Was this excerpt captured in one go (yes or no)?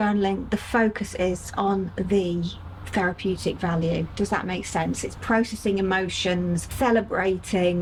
yes